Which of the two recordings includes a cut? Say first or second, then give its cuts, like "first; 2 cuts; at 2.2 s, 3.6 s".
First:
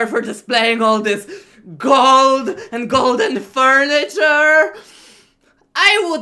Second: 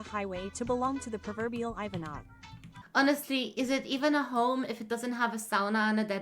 second; 1 cut; at 2.8 s